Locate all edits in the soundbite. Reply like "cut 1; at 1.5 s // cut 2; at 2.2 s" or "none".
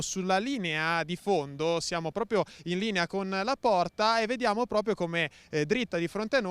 cut 1; at 2.9 s